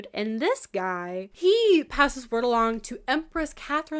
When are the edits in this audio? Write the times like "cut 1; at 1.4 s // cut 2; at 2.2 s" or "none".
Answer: cut 1; at 1.3 s